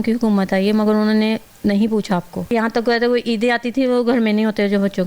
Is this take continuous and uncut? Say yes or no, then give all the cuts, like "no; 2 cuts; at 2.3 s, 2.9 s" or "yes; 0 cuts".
no; 1 cut; at 2.5 s